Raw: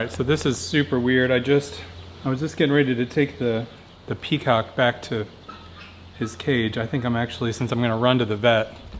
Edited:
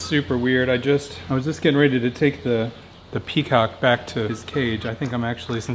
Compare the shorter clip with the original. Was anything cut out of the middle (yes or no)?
yes